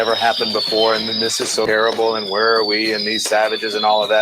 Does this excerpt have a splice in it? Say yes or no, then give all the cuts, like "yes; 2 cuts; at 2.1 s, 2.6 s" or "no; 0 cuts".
yes; 1 cut; at 1.6 s